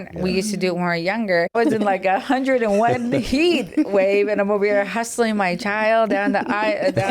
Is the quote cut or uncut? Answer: cut